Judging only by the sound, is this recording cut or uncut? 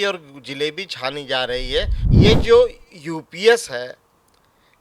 cut